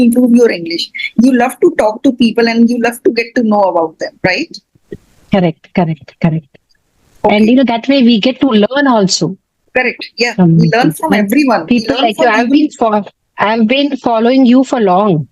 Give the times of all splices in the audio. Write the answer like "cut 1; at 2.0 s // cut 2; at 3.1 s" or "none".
none